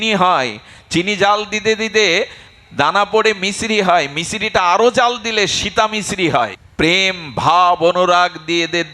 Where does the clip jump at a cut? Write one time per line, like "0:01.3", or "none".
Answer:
0:06.6